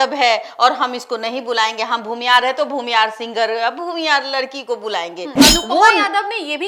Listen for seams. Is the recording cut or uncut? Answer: cut